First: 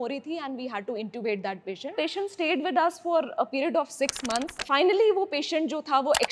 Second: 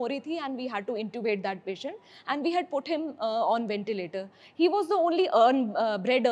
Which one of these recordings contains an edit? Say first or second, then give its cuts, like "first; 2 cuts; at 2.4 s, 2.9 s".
first; 2 cuts; at 1.9 s, 4.6 s